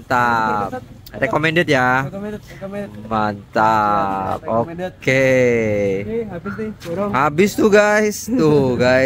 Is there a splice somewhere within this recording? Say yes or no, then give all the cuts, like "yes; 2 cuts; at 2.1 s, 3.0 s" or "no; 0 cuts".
no; 0 cuts